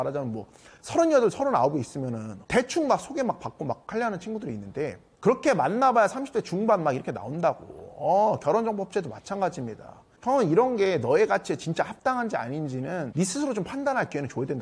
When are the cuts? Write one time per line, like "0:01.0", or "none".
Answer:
0:02.3
0:05.1
0:13.1